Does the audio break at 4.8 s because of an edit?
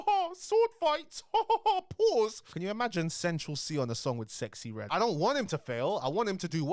yes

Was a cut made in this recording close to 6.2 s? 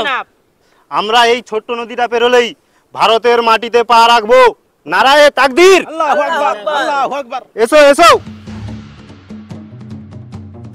no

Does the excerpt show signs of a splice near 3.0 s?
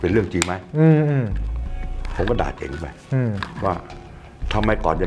no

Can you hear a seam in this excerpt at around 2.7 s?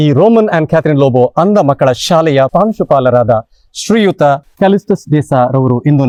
no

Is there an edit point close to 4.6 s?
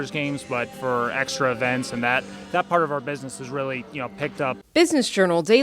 yes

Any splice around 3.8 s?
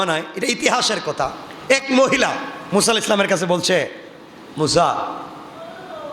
no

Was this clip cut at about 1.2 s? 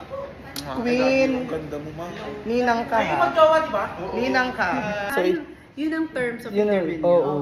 no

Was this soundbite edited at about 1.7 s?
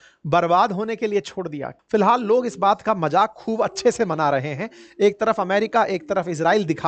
yes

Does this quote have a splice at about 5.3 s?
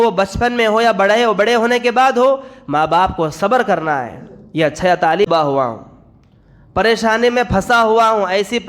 yes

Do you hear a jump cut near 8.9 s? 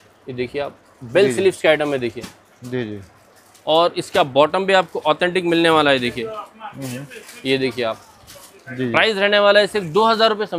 no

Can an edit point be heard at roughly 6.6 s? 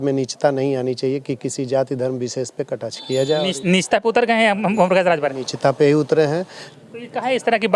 yes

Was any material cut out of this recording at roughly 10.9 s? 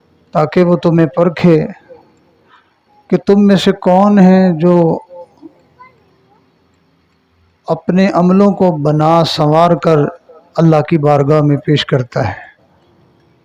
no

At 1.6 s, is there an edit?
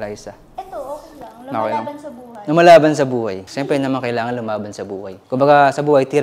no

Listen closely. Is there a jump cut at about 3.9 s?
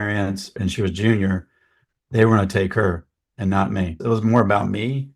yes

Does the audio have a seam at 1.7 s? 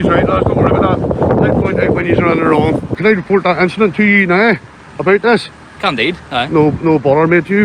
no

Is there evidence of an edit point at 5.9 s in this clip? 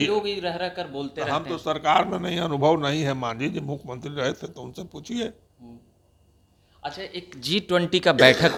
no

